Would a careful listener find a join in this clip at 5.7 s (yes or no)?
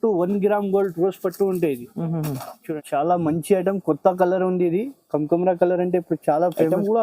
no